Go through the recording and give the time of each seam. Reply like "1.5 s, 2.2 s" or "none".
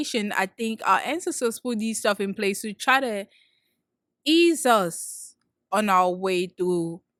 none